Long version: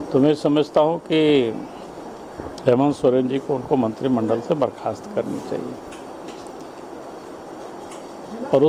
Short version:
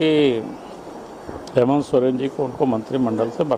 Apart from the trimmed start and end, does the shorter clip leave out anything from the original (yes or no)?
no